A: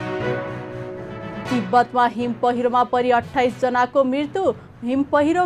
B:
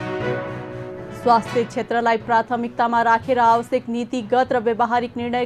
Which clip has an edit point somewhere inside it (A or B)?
B